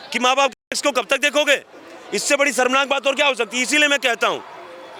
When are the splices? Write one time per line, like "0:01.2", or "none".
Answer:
none